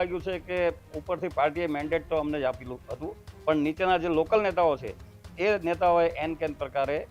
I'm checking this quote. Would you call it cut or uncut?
uncut